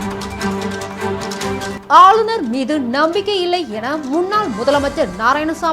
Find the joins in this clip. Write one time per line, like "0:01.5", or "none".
0:01.7